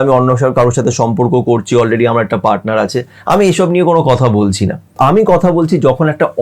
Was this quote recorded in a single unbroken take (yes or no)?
no